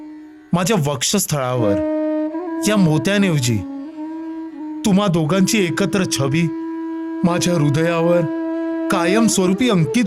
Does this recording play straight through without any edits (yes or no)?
yes